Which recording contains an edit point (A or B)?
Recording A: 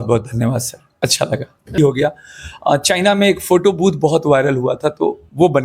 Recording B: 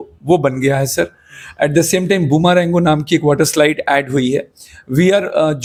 A